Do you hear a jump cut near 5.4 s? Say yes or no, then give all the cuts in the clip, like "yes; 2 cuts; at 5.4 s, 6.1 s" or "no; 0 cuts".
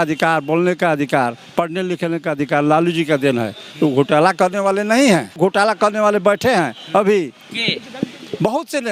yes; 1 cut; at 5.4 s